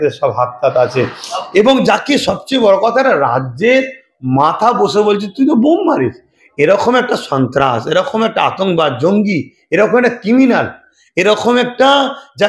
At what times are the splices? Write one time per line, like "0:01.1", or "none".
none